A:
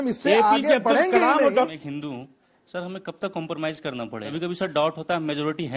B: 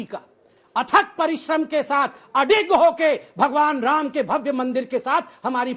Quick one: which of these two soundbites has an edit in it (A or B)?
A